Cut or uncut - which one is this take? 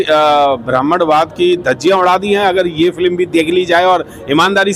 uncut